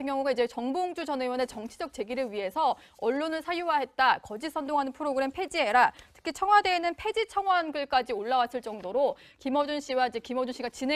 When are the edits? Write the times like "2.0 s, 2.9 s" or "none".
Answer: none